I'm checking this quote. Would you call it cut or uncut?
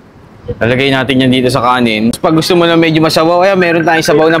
cut